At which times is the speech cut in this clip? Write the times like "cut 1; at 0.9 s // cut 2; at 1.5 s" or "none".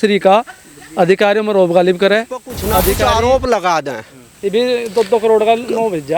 cut 1; at 2.9 s

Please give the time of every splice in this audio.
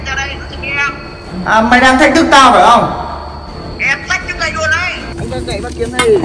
cut 1; at 5.1 s

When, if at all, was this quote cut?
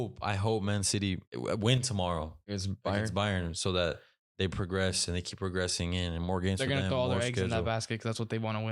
cut 1; at 1.3 s // cut 2; at 2.4 s

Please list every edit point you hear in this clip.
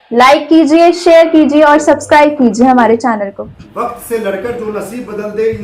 cut 1; at 3.5 s

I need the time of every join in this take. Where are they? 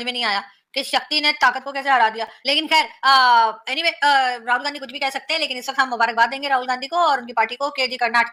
none

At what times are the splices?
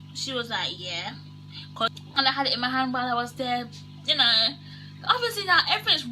cut 1; at 1.9 s

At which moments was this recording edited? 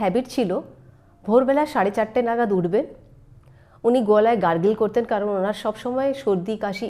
none

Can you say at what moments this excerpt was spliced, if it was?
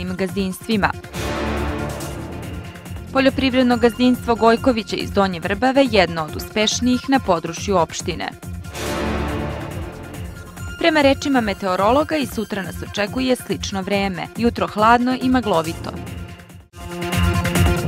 cut 1; at 17.0 s

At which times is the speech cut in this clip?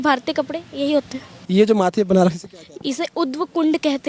cut 1; at 1.3 s

